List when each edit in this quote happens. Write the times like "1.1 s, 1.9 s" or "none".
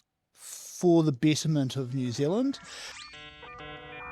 3.1 s